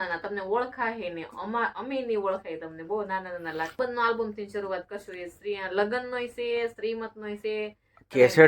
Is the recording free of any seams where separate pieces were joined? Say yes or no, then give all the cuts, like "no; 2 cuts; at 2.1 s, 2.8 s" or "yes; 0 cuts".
no; 1 cut; at 3.7 s